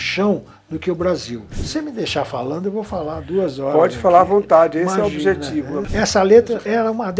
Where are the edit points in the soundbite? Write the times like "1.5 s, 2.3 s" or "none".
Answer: 1.6 s, 5.9 s